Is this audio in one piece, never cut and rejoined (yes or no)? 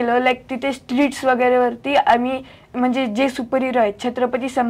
no